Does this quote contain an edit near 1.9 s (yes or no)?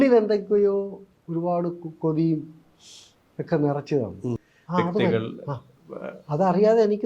no